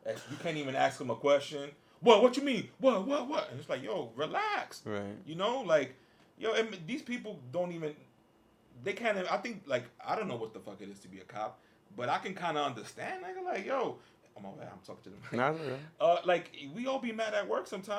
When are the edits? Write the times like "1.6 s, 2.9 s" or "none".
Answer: none